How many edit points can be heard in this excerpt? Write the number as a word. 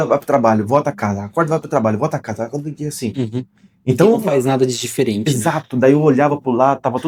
zero